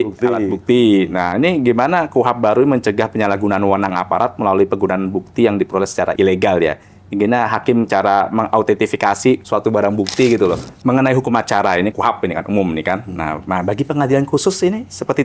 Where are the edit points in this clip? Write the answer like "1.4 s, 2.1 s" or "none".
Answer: 9.4 s, 10.7 s